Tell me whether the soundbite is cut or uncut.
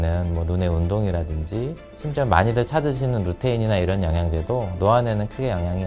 uncut